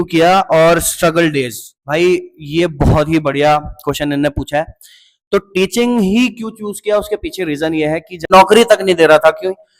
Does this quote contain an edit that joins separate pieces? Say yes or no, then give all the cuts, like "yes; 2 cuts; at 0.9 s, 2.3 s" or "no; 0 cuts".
yes; 1 cut; at 8.3 s